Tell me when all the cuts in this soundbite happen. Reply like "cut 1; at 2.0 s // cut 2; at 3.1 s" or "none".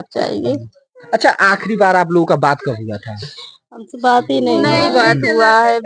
none